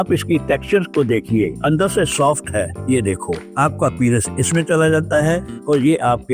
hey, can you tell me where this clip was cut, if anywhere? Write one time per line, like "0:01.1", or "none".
0:03.4